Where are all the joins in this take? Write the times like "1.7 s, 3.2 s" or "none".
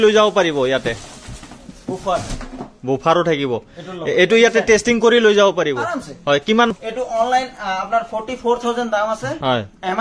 6.7 s